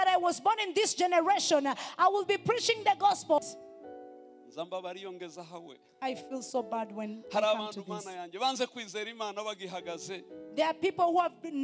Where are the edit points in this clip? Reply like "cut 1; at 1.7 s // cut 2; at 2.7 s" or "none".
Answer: cut 1; at 3.4 s